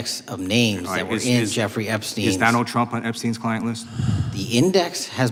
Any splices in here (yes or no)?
no